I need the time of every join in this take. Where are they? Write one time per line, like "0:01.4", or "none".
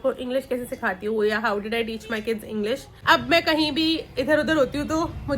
0:02.9